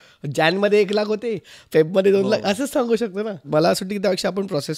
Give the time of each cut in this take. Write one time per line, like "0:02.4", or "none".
0:03.5